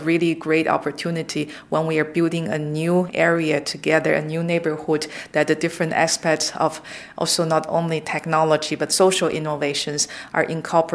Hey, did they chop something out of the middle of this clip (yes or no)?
no